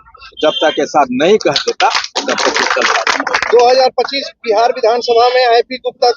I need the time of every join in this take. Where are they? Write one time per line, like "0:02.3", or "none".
0:03.1